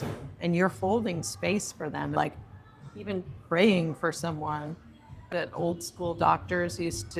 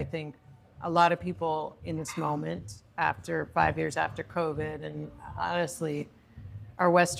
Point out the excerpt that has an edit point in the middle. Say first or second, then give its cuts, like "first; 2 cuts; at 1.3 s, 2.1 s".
first; 2 cuts; at 2.1 s, 5.3 s